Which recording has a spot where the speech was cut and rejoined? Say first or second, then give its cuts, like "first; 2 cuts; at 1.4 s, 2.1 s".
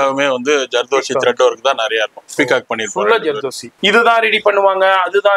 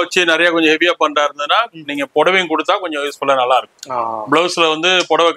first; 1 cut; at 3.6 s